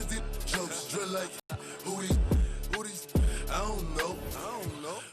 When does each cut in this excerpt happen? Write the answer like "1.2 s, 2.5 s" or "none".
2.6 s